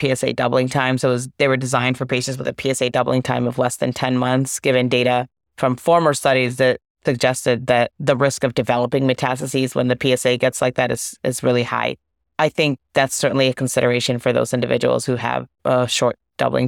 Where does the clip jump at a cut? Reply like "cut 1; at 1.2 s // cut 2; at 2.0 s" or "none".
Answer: cut 1; at 6.9 s